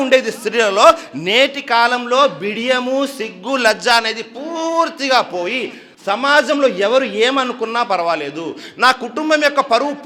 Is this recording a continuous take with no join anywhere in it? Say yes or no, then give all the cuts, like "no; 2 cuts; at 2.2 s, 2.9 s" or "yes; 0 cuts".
yes; 0 cuts